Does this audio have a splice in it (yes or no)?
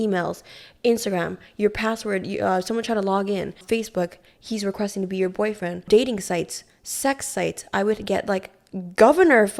no